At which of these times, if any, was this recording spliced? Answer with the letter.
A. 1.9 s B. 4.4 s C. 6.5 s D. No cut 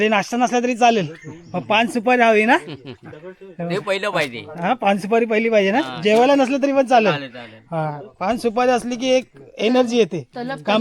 D